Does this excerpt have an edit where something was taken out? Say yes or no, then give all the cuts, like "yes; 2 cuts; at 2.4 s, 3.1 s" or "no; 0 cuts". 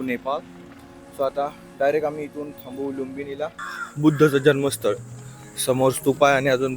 yes; 1 cut; at 3.6 s